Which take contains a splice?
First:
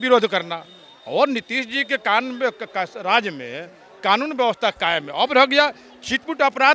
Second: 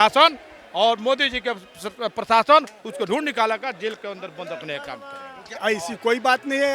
second; 1 cut; at 5.6 s

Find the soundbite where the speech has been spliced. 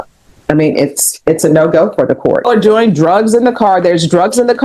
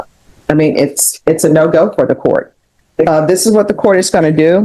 first; 1 cut; at 2.4 s

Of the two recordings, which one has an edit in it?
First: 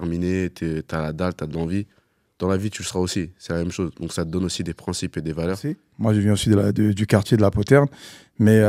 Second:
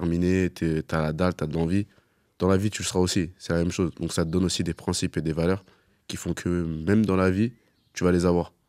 first; 1 cut; at 5.9 s

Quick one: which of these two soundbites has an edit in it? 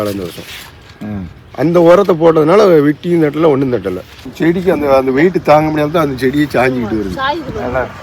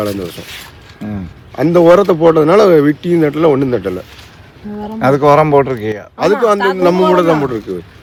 first; 1 cut; at 4.2 s

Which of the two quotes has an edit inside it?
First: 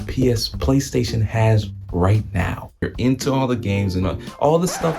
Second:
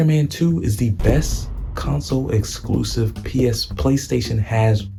first; 1 cut; at 2.9 s

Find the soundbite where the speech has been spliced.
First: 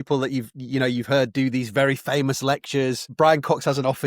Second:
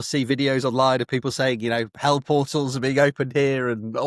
first; 1 cut; at 3.1 s

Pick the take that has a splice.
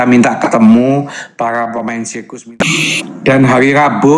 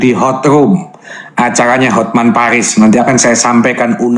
first; 1 cut; at 2.2 s

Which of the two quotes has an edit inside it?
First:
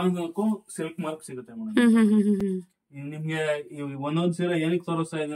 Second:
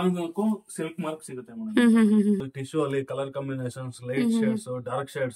second; 1 cut; at 2.4 s

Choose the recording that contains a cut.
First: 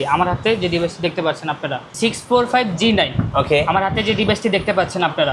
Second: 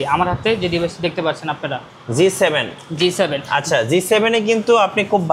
first; 1 cut; at 1.9 s

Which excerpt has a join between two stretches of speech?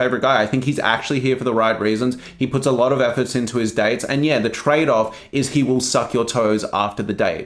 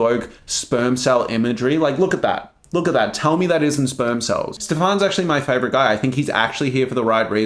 second; 1 cut; at 4.6 s

